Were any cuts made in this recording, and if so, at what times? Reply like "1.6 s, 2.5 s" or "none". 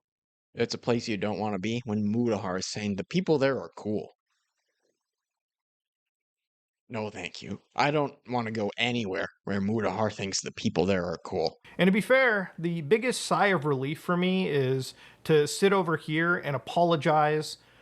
11.6 s